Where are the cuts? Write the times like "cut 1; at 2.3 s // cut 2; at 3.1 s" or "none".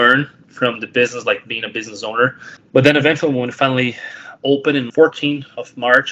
cut 1; at 2.5 s // cut 2; at 4.9 s